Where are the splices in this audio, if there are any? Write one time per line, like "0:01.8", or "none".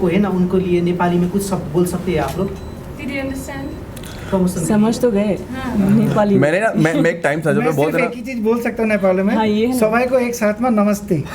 none